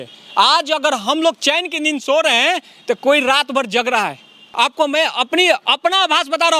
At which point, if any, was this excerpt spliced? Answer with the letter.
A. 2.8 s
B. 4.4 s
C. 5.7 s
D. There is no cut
B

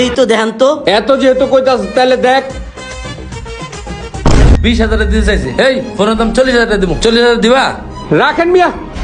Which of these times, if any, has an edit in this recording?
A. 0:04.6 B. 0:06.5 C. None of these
A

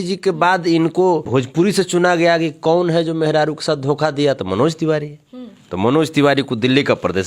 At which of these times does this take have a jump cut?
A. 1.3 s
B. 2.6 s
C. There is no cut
A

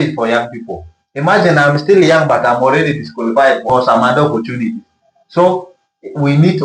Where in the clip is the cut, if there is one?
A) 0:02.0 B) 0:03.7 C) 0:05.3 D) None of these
B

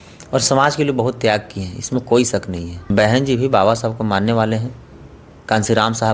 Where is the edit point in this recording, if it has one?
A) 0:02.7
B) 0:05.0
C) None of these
A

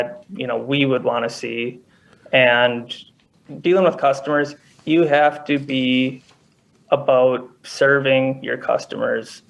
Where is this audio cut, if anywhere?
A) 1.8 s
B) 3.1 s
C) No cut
B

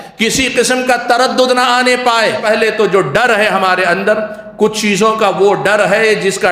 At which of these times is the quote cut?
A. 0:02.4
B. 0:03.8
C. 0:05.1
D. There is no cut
A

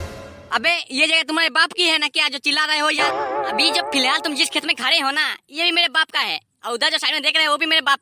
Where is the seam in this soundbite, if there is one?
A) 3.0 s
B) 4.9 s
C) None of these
A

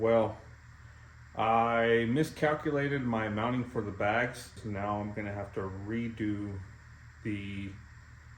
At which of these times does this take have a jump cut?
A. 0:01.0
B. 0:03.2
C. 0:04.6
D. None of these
C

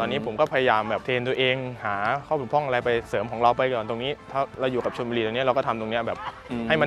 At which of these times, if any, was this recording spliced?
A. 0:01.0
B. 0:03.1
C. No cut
A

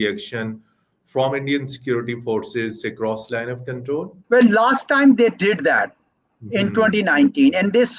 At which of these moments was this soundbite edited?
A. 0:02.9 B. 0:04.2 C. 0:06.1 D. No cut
B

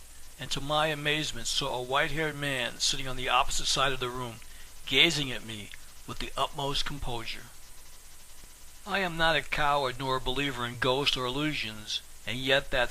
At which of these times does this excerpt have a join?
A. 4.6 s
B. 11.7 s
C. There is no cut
B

